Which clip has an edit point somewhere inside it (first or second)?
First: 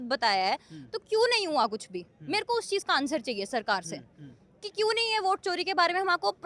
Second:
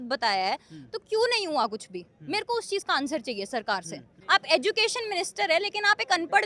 second